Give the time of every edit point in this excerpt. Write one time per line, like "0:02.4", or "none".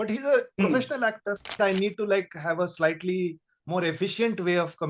0:01.6